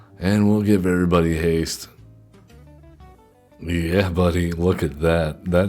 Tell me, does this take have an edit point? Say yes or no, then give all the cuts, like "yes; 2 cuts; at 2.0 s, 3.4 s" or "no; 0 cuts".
yes; 1 cut; at 3.6 s